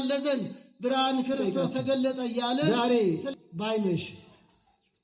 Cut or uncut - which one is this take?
cut